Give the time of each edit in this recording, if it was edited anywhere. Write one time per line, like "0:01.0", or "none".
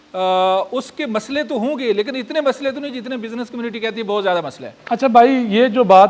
none